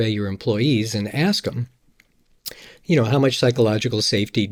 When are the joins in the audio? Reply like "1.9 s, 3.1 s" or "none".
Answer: none